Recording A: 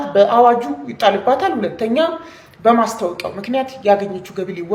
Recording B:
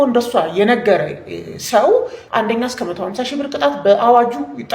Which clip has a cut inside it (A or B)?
B